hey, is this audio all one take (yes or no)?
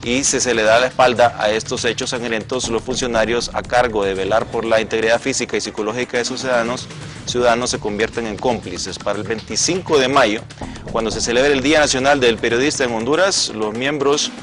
yes